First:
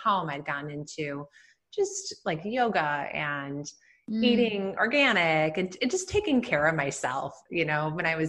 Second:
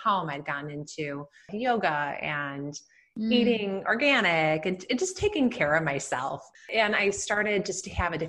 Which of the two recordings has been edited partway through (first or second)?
second